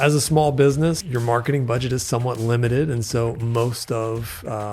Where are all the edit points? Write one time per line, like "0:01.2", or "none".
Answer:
0:01.0